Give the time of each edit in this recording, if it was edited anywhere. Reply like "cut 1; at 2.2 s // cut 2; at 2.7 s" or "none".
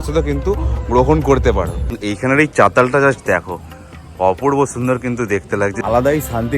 cut 1; at 1.9 s // cut 2; at 5.8 s